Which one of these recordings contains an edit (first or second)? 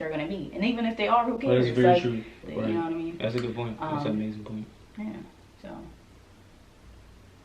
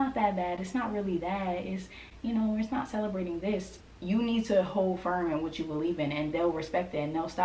first